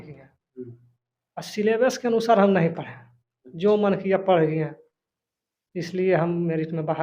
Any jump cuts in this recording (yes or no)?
no